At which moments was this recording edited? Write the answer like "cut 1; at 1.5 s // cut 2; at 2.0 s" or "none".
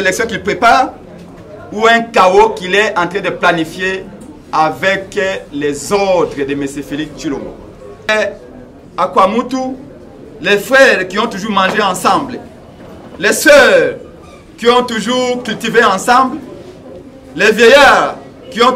cut 1; at 8.1 s